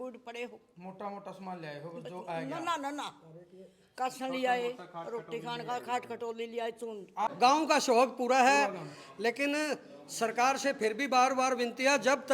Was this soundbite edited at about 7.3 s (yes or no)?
yes